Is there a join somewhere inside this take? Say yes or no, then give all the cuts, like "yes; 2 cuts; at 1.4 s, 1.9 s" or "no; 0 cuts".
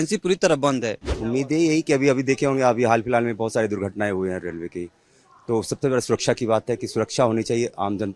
yes; 1 cut; at 1.1 s